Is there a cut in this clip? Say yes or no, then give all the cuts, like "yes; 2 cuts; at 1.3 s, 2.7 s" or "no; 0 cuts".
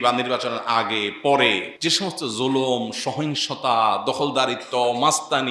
yes; 1 cut; at 1.7 s